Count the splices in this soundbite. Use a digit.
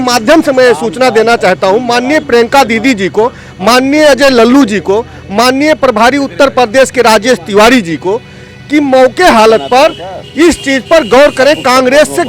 0